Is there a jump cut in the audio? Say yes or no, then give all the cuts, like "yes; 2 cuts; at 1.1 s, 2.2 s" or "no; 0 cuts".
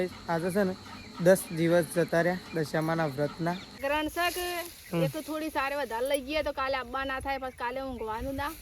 yes; 1 cut; at 3.8 s